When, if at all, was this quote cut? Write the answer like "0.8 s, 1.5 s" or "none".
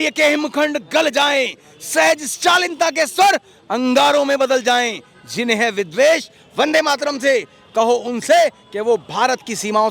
none